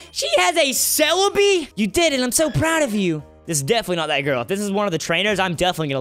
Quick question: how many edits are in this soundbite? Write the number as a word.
one